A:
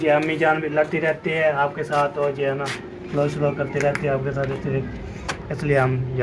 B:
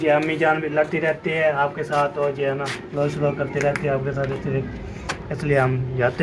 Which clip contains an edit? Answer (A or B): B